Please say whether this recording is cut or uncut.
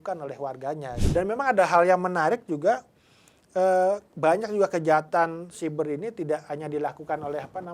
cut